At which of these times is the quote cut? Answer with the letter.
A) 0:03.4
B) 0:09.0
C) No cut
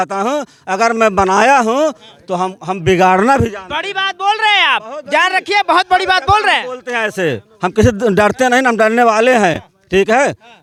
C